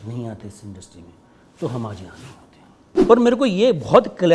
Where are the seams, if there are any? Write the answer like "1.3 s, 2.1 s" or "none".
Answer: 3.0 s